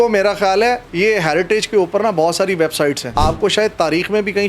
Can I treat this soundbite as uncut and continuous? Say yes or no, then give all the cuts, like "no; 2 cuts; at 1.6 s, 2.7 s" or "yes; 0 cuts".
no; 1 cut; at 3.0 s